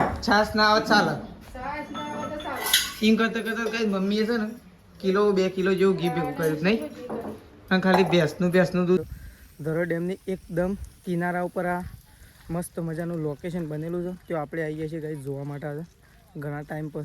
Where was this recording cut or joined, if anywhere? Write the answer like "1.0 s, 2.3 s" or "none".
9.0 s

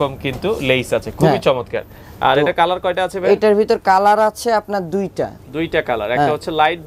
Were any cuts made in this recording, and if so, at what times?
none

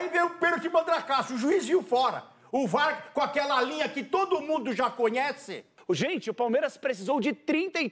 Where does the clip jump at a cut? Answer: 5.7 s

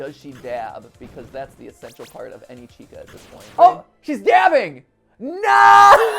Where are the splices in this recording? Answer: 3.4 s

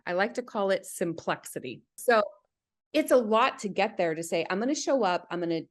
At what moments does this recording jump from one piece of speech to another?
2.0 s

